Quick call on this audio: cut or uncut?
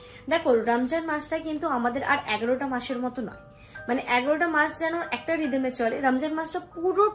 uncut